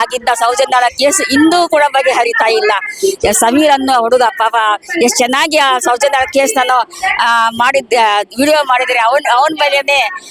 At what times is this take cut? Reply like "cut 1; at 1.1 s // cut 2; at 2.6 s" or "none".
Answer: none

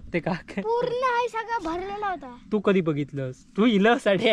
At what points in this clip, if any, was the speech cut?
none

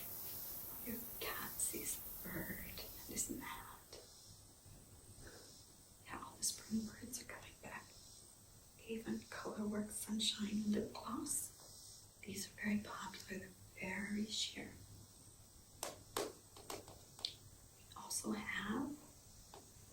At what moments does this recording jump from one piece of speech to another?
none

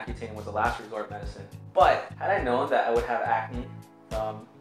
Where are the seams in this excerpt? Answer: none

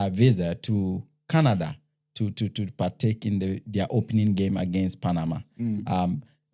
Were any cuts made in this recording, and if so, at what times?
none

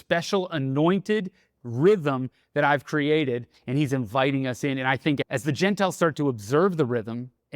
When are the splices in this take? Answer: cut 1; at 5.2 s

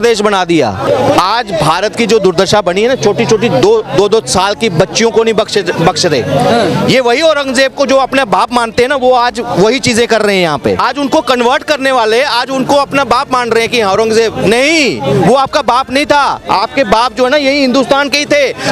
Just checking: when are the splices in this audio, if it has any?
cut 1; at 0.9 s // cut 2; at 10.8 s

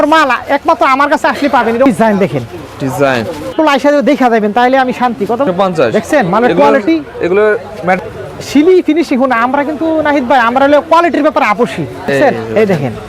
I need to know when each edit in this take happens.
cut 1; at 1.9 s // cut 2; at 3.5 s // cut 3; at 5.5 s // cut 4; at 8.0 s // cut 5; at 12.1 s

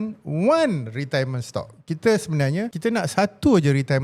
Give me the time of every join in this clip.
cut 1; at 2.7 s

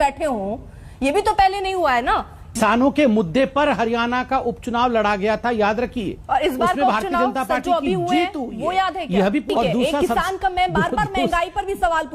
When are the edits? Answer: cut 1; at 2.6 s // cut 2; at 9.5 s

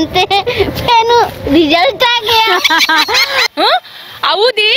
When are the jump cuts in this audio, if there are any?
cut 1; at 3.5 s

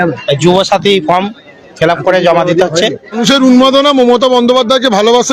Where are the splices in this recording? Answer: cut 1; at 3.2 s

